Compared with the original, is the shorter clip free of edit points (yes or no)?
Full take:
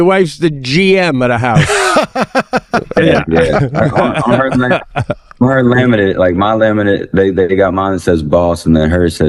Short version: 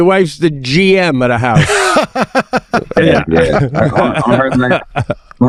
yes